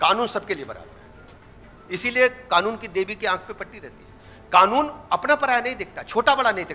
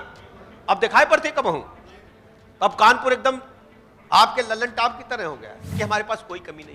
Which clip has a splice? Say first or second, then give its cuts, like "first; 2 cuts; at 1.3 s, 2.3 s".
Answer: second; 1 cut; at 5.7 s